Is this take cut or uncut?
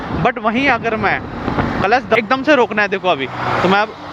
cut